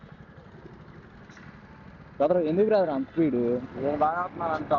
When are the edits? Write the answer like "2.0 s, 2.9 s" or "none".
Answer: none

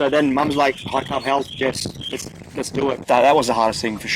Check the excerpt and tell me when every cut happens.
3.0 s

